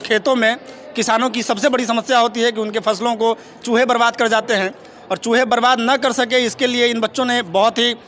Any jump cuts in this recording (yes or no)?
no